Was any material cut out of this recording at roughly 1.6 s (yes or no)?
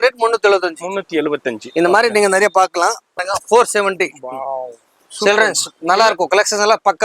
no